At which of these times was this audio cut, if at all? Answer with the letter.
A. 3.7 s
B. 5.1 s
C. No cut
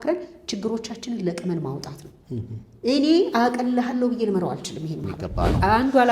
B